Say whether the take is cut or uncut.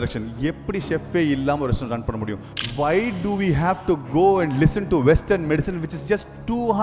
cut